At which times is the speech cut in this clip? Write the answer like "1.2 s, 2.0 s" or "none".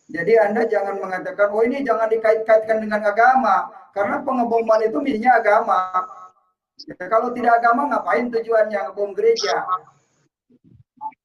none

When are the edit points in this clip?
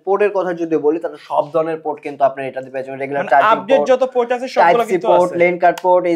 none

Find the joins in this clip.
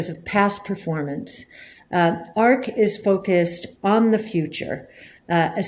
none

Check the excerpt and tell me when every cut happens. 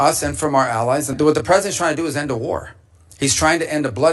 1.1 s

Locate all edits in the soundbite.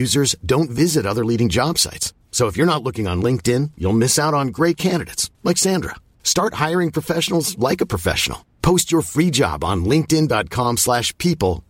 none

